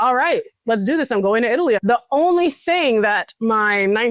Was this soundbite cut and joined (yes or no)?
yes